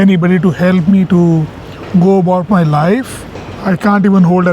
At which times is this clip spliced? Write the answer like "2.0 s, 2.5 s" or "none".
3.2 s

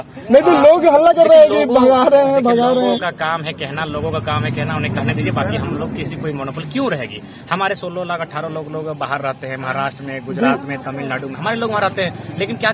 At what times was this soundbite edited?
none

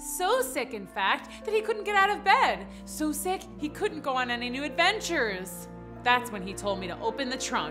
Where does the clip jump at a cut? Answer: none

